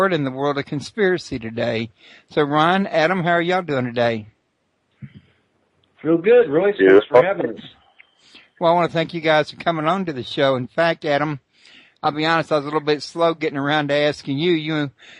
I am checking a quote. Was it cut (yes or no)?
no